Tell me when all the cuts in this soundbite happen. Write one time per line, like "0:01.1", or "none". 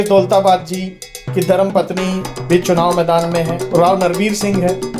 0:03.7